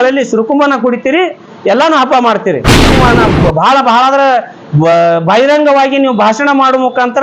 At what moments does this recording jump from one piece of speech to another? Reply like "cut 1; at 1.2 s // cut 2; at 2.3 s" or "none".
cut 1; at 3.0 s